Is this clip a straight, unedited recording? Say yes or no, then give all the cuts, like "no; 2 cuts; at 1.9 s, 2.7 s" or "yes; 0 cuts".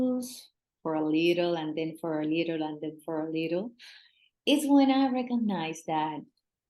yes; 0 cuts